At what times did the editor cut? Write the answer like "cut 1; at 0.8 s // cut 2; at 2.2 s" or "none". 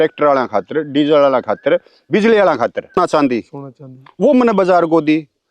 cut 1; at 3.0 s